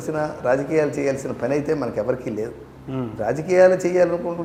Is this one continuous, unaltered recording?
yes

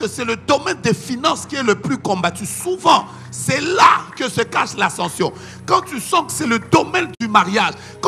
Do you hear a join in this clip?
no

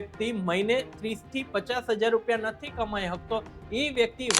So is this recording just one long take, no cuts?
yes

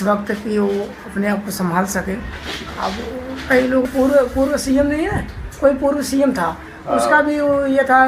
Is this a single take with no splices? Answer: no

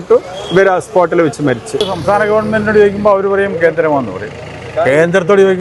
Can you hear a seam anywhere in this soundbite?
yes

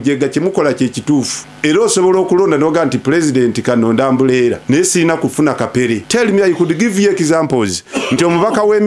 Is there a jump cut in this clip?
yes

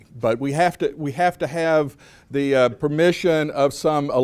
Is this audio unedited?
no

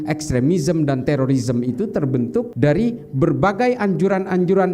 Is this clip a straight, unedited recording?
no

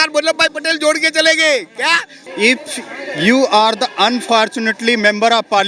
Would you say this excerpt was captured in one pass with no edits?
no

